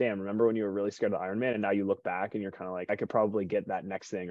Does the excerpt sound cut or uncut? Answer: cut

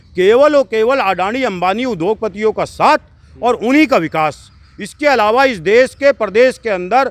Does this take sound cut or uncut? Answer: uncut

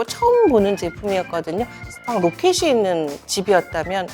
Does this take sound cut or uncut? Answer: cut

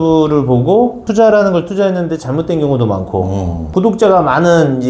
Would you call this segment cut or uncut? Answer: cut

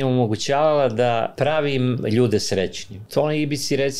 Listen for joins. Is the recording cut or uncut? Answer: cut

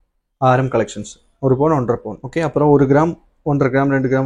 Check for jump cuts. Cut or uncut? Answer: cut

